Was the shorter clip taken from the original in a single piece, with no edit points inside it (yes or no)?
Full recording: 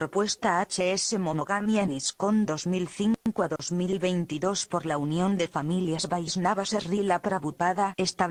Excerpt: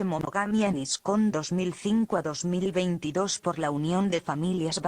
no